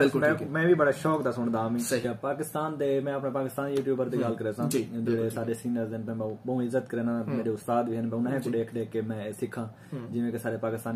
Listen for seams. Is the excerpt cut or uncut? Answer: cut